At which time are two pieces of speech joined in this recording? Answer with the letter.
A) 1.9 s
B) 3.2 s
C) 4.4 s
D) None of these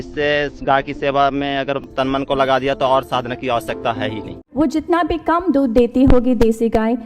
C